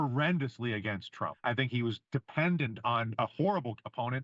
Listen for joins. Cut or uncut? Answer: cut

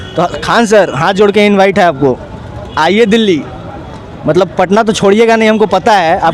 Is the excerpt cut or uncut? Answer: uncut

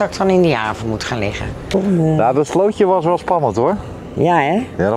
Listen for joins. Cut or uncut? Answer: cut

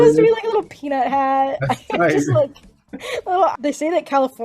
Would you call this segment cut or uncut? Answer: cut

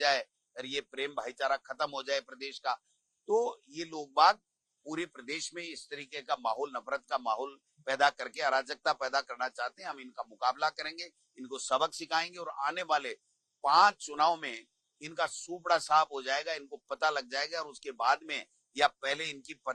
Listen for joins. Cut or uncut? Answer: uncut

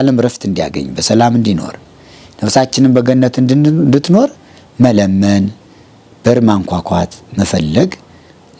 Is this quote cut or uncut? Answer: uncut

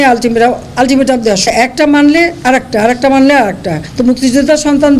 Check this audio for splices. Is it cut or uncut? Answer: cut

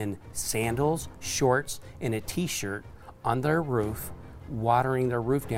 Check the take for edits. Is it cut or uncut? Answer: uncut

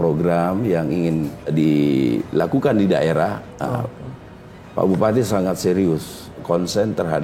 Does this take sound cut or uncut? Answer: cut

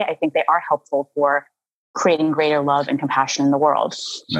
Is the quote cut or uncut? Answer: uncut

